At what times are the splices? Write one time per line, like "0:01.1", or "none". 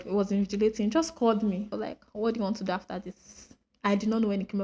0:01.7